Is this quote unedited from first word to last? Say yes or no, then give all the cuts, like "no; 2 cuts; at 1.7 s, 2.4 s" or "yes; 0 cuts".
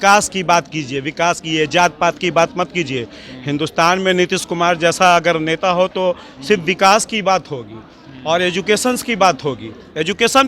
yes; 0 cuts